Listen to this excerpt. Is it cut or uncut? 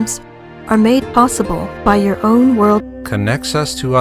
uncut